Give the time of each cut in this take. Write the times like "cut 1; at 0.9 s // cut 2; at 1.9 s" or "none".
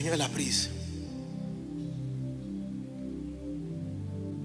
none